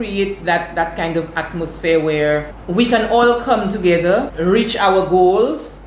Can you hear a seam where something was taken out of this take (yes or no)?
yes